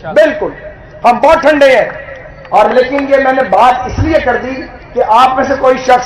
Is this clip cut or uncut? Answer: uncut